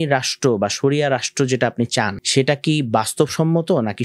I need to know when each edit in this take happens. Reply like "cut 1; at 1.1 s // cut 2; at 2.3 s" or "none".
cut 1; at 2.2 s